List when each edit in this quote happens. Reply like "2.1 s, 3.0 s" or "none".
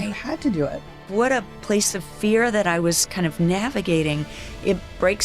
1.0 s